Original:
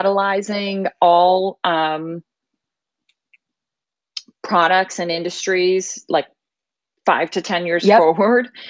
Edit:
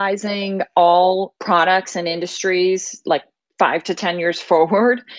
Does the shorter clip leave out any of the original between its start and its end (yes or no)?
yes